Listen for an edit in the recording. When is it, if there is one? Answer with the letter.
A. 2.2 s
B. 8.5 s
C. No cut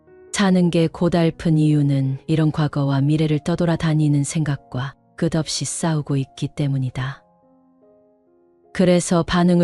C